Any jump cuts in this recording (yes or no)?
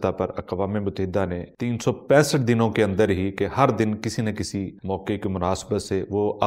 yes